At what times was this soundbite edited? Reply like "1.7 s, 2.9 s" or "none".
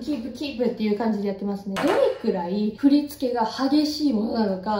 1.7 s